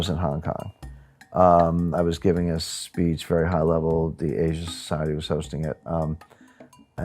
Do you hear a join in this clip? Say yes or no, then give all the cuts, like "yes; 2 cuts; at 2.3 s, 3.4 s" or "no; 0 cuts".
no; 0 cuts